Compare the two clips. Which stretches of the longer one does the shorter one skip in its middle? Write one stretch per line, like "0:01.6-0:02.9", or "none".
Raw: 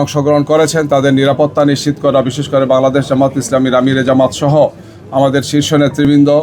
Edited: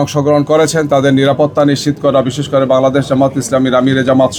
none